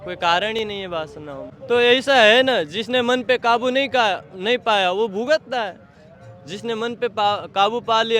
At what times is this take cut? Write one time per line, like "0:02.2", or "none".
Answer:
0:01.5